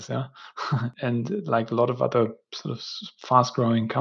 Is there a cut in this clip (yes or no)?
yes